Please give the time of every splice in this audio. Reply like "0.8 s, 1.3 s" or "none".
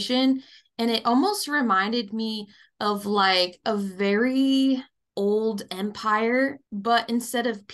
5.0 s, 6.7 s

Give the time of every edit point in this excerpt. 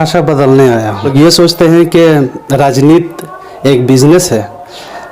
1.1 s

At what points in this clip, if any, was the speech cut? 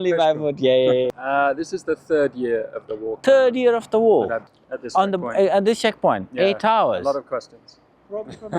1.1 s, 3.1 s, 4.5 s

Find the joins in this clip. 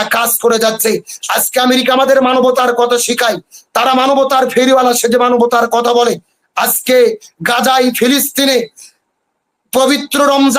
1.1 s

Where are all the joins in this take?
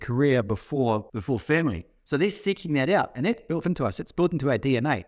1.1 s

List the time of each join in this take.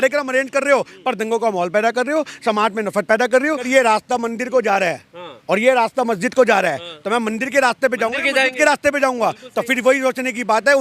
3.7 s

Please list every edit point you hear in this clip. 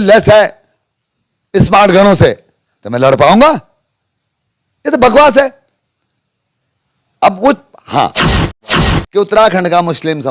8.6 s

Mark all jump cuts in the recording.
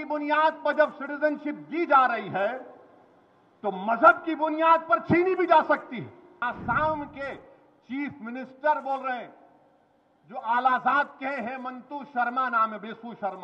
6.4 s

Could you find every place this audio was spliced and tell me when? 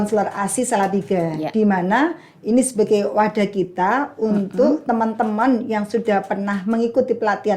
none

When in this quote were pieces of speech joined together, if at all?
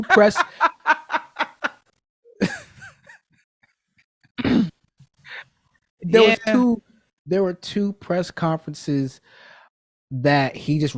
none

